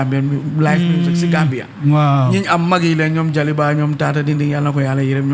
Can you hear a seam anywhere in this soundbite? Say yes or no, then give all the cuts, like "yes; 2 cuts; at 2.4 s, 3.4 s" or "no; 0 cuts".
no; 0 cuts